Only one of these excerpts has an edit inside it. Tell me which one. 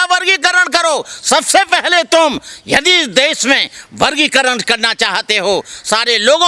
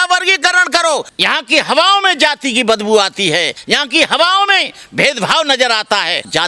second; 2 cuts; at 1.1 s, 3.6 s

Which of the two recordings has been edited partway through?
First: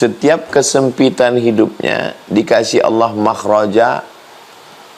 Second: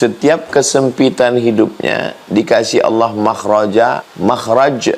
second; 1 cut; at 4.1 s

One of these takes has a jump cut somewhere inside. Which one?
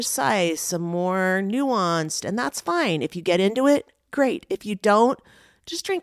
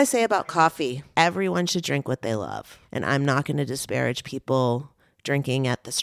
second; 2 cuts; at 1.0 s, 2.8 s

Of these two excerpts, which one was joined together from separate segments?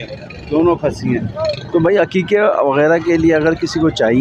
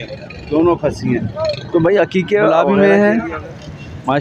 second; 1 cut; at 2.5 s

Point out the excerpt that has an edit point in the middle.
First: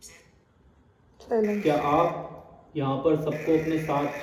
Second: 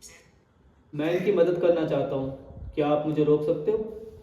second; 1 cut; at 0.9 s

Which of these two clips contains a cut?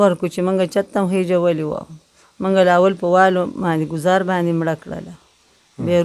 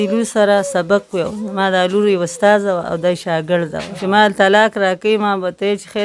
second; 1 cut; at 3.9 s

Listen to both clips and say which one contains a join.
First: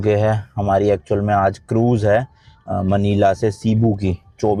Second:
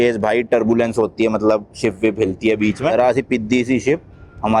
second; 1 cut; at 2.9 s

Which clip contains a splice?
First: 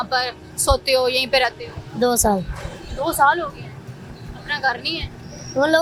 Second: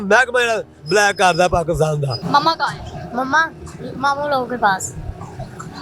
second; 1 cut; at 2.2 s

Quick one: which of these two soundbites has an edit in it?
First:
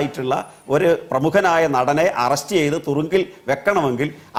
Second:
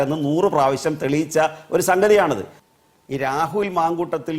second; 1 cut; at 2.5 s

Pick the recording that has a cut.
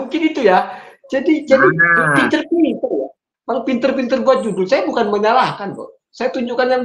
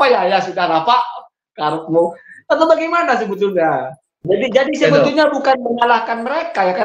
second; 1 cut; at 4.1 s

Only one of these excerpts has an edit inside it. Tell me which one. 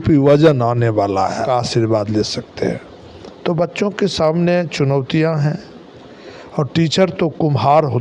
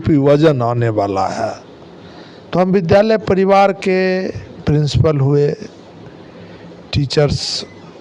first; 1 cut; at 1.5 s

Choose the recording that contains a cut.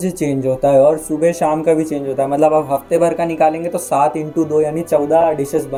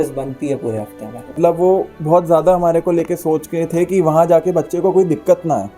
second; 1 cut; at 1.4 s

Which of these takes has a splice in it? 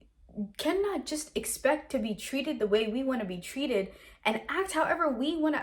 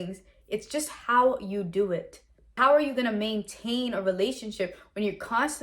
second; 1 cut; at 2.6 s

